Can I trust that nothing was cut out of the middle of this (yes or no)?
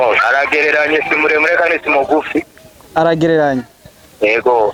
yes